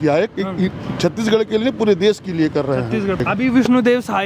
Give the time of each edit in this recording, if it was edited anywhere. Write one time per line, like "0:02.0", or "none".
0:03.2